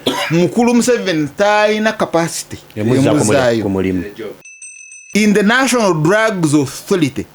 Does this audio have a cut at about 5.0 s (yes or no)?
yes